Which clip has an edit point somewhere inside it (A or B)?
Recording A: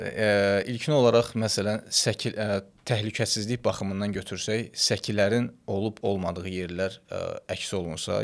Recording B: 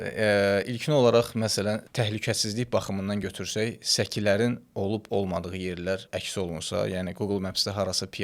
B